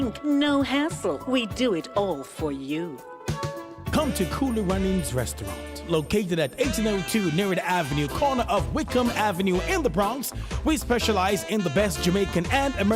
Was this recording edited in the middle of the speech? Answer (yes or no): yes